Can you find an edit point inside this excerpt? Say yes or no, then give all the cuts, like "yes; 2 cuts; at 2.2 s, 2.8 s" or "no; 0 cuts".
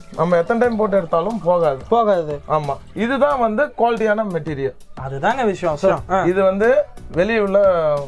yes; 1 cut; at 6.0 s